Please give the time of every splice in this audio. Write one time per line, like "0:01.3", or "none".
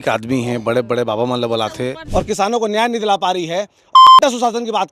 0:02.0